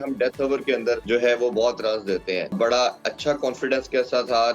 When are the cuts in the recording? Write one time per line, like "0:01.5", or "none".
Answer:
0:01.0
0:02.5